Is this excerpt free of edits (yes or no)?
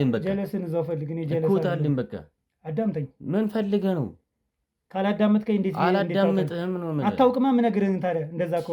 yes